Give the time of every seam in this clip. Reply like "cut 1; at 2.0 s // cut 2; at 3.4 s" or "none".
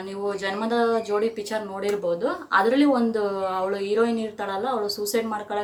none